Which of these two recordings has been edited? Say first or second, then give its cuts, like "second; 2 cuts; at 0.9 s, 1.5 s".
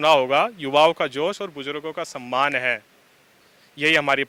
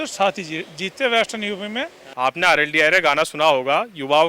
second; 1 cut; at 2.1 s